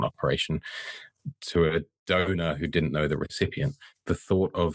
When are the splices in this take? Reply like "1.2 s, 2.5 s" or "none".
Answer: 3.9 s